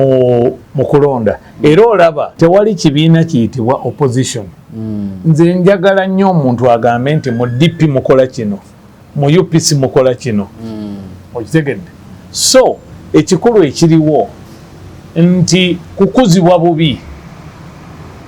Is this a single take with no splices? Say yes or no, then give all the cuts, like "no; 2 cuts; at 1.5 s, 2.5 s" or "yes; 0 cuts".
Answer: no; 1 cut; at 2.3 s